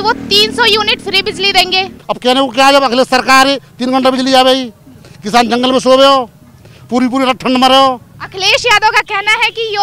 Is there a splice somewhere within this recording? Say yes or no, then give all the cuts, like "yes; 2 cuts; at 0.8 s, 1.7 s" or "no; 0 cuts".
yes; 2 cuts; at 1.9 s, 8.1 s